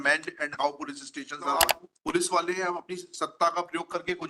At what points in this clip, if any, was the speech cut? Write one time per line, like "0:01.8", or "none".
0:01.6